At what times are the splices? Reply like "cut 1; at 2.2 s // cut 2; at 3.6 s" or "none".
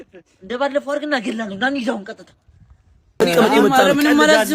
cut 1; at 3.1 s